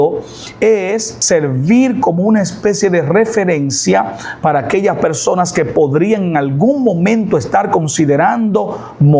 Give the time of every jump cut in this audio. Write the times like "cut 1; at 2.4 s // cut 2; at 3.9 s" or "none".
cut 1; at 1.1 s